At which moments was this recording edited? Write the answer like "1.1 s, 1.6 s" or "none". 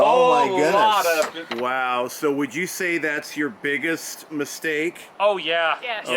1.4 s, 5.0 s